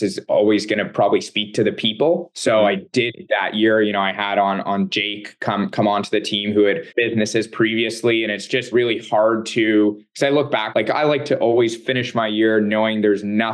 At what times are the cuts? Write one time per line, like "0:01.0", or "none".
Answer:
0:06.8
0:08.7
0:10.7